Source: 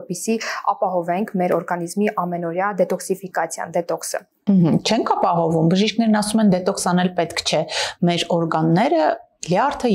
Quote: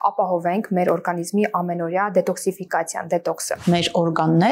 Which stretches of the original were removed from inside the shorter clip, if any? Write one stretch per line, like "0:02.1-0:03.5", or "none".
0:04.2-0:07.9